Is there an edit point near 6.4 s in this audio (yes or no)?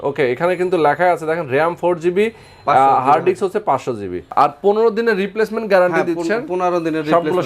no